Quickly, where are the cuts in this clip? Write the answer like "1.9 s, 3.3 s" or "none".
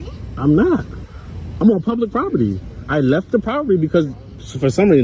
none